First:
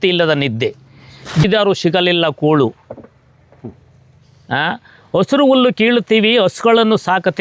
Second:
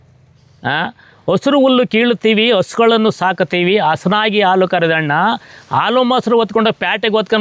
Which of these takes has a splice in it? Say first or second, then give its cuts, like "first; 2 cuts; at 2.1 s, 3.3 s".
first; 1 cut; at 1.4 s